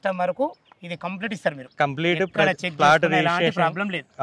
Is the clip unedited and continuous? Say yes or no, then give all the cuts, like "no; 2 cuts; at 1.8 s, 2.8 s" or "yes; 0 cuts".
yes; 0 cuts